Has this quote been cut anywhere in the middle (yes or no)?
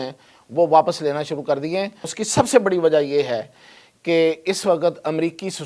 yes